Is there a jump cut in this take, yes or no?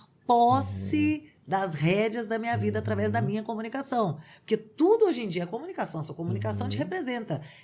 no